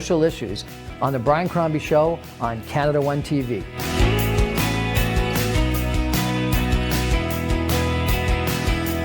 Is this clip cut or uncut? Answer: uncut